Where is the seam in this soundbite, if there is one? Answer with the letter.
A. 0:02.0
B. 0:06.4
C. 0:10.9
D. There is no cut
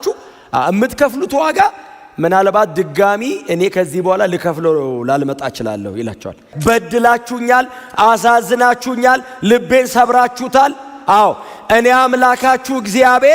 B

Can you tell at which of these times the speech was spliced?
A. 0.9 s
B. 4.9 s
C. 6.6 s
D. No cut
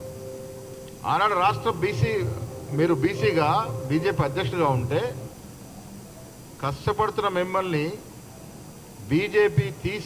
A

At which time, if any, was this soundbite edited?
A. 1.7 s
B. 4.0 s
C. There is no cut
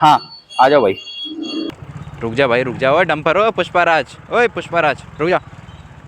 A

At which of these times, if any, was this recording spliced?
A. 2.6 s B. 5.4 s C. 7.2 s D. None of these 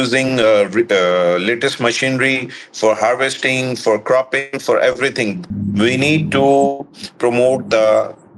B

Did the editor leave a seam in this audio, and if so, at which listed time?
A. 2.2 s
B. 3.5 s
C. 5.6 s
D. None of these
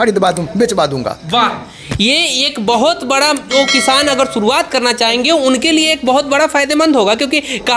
B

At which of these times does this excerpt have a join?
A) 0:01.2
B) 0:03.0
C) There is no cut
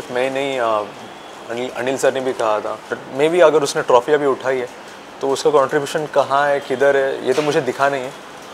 B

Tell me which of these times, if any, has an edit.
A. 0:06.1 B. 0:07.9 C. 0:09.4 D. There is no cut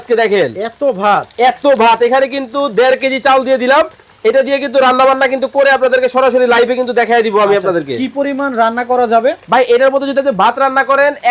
D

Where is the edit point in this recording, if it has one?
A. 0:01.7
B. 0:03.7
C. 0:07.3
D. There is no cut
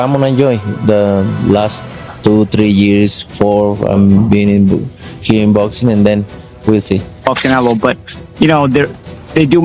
C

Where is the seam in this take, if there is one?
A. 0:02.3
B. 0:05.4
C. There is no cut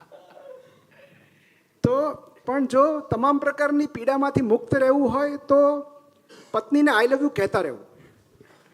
A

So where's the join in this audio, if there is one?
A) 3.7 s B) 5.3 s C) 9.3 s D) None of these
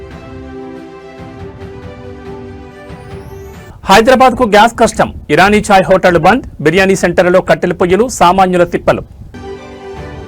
A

